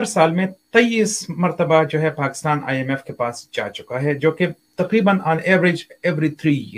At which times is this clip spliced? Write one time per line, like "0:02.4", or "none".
none